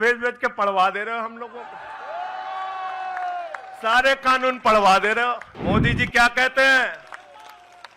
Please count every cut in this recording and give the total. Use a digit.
1